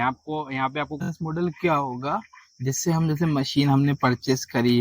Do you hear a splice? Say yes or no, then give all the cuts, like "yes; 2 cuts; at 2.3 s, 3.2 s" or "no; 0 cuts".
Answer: yes; 1 cut; at 1.0 s